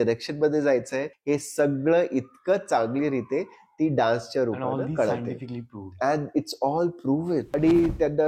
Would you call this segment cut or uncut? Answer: cut